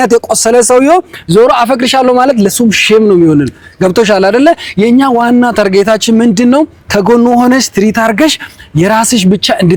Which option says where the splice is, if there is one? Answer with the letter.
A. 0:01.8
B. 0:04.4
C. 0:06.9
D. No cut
D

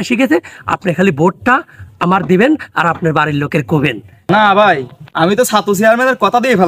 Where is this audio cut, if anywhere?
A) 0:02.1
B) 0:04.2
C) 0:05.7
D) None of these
B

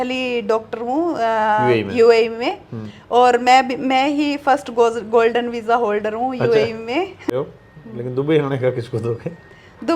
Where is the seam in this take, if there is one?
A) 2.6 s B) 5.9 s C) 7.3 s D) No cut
C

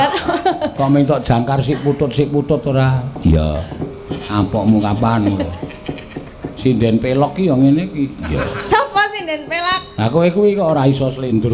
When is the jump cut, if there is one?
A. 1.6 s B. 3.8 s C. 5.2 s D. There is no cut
B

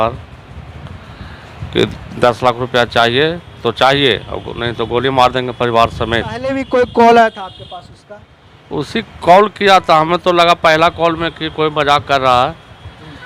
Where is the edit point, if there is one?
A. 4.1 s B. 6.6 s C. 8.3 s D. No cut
B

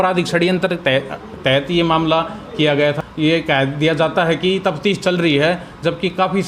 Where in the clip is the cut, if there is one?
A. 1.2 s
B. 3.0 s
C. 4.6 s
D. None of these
B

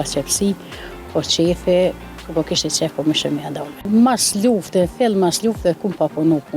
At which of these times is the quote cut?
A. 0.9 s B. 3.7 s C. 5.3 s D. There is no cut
B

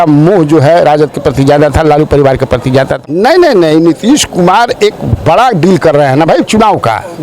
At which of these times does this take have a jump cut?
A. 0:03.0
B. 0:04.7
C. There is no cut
A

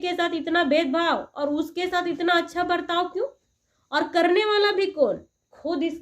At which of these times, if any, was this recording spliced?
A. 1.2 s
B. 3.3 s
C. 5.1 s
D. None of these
D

